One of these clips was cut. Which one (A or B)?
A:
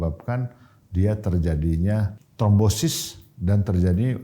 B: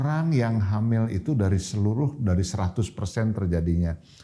A